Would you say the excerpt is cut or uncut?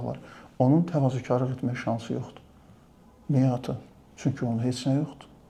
uncut